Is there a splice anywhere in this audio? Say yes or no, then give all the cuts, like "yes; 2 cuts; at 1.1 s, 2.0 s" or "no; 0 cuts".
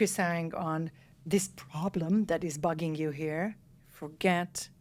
no; 0 cuts